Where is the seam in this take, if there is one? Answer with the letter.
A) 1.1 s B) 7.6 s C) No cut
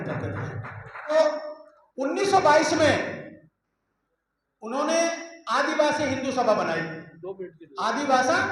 A